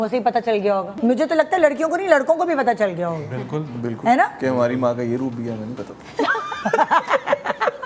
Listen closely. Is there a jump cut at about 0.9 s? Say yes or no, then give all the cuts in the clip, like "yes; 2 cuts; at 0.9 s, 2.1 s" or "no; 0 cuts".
yes; 1 cut; at 0.9 s